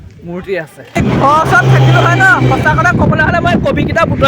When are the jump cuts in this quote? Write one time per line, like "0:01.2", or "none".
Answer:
0:01.0